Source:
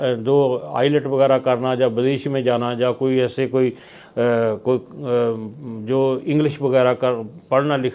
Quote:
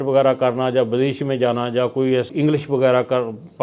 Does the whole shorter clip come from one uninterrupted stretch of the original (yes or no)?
no